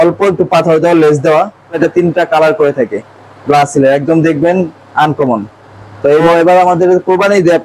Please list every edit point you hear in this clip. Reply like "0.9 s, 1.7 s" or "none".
1.8 s, 6.3 s